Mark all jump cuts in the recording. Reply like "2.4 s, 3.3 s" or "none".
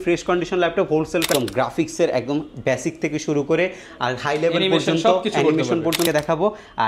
1.3 s, 6.1 s